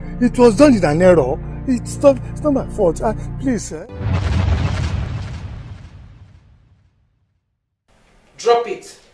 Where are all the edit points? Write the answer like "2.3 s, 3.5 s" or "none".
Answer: 3.7 s